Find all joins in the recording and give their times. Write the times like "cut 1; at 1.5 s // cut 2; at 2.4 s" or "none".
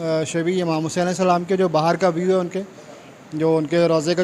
none